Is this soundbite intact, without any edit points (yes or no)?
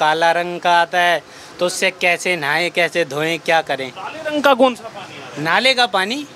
yes